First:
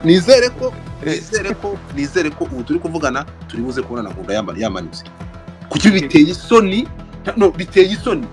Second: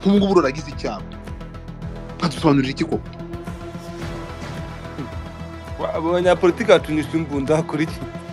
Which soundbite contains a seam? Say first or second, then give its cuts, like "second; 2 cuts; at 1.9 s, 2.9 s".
second; 2 cuts; at 3.0 s, 5.6 s